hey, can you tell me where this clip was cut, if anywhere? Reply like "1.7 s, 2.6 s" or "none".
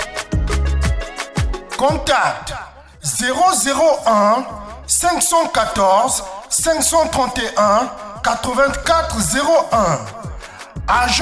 1.5 s